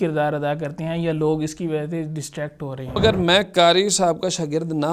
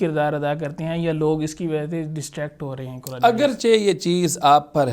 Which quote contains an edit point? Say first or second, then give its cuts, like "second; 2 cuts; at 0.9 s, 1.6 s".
first; 1 cut; at 3.0 s